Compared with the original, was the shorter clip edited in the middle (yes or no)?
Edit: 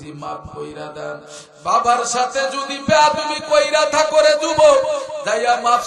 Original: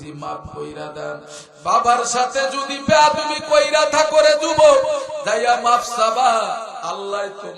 no